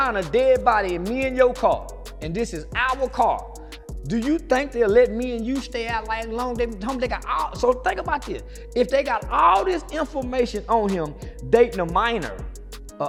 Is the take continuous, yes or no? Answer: yes